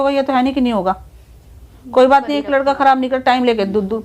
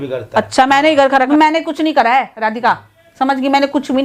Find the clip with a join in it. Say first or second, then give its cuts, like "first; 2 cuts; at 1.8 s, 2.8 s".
second; 1 cut; at 1.3 s